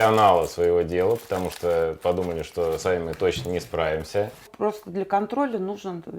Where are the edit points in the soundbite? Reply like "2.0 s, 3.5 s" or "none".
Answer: 4.5 s